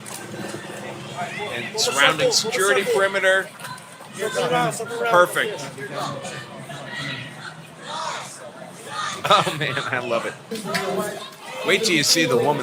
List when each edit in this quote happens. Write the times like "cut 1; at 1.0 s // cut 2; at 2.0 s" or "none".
cut 1; at 10.4 s